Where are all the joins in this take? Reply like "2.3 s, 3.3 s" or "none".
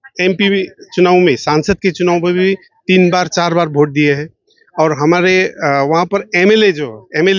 none